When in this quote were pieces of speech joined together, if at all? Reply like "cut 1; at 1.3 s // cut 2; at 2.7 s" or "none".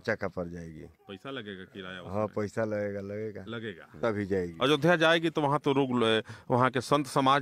cut 1; at 4.0 s